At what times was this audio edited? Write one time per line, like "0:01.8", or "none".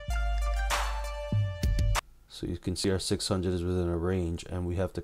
0:02.7